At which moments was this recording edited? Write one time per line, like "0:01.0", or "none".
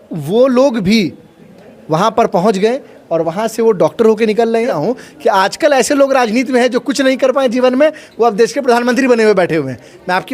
0:04.8

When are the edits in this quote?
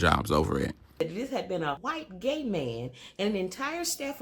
0:00.9
0:01.8

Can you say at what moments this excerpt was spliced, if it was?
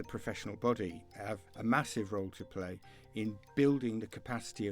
0:01.5

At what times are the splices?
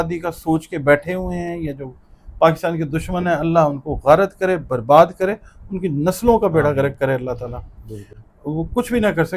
none

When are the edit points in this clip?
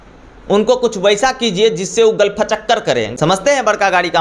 0:03.1

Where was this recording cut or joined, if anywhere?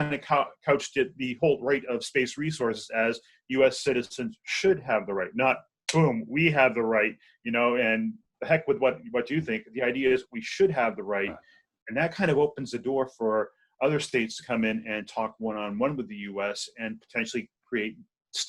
none

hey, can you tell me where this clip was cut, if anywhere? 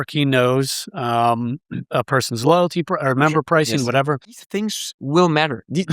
0:04.5

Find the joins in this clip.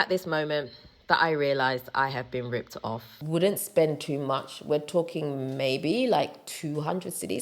0:03.2

